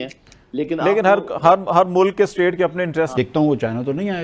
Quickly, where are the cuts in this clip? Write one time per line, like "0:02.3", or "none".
0:03.1